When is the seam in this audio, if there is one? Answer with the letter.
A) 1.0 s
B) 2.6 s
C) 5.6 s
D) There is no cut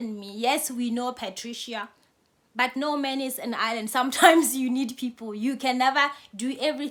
D